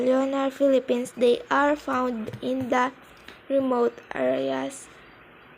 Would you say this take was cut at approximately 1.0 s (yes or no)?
yes